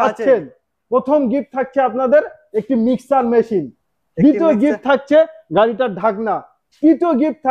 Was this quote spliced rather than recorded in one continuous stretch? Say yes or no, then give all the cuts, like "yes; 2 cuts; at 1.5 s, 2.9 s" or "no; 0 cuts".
no; 0 cuts